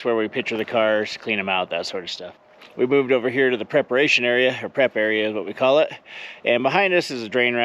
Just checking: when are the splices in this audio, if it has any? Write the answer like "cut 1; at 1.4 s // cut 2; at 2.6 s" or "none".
cut 1; at 2.6 s

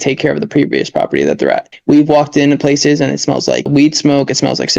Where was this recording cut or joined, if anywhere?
cut 1; at 1.7 s // cut 2; at 3.7 s

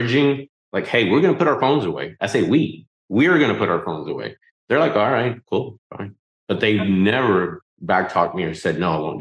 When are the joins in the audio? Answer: cut 1; at 7.7 s

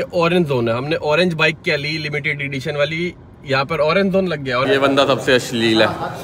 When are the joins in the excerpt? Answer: cut 1; at 4.7 s

